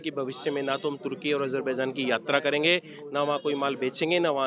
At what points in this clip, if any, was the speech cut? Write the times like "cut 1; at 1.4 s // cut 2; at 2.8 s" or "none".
none